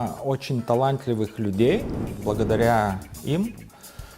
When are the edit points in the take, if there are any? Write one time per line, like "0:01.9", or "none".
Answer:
0:02.1